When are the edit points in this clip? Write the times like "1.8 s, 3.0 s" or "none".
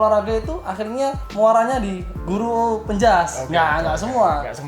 1.2 s